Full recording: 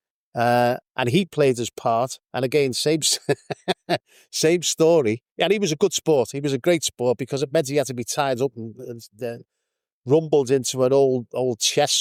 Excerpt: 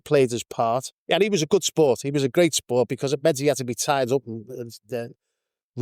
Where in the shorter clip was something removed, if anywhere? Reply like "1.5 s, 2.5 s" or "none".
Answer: 1.0 s